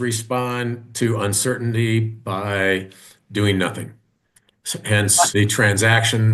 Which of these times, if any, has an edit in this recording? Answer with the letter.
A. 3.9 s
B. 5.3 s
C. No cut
B